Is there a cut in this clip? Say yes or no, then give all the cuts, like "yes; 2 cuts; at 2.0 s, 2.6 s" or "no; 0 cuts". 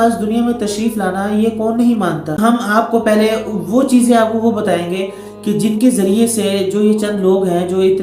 yes; 1 cut; at 2.4 s